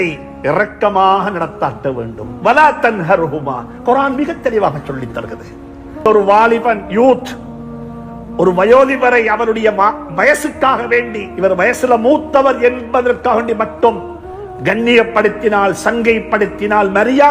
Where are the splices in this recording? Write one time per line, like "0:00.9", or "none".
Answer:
0:06.0